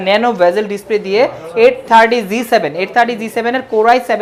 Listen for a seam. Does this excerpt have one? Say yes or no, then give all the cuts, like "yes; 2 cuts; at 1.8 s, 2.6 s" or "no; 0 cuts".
no; 0 cuts